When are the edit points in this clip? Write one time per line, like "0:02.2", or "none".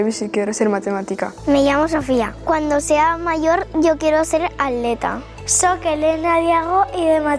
0:01.3
0:05.3